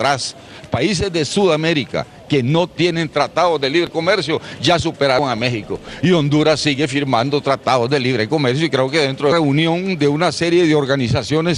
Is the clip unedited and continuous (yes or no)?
yes